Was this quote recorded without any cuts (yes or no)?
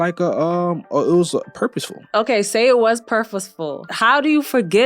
no